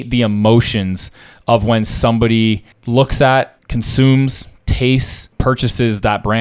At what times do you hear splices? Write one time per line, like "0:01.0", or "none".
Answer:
0:02.7
0:03.6
0:05.3